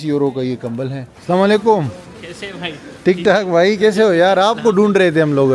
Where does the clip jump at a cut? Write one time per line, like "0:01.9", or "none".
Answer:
0:01.1